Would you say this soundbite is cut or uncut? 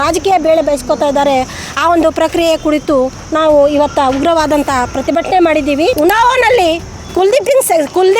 cut